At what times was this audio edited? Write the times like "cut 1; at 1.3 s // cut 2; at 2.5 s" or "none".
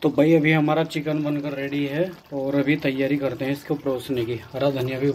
none